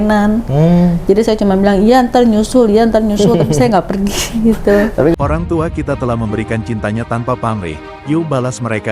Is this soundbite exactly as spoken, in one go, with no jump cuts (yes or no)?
no